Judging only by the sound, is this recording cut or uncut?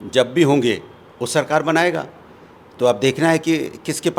uncut